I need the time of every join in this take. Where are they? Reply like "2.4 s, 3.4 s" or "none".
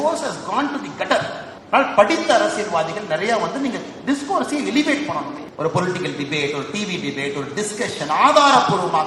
1.5 s, 5.4 s